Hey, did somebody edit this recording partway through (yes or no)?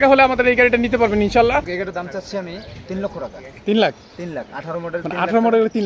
yes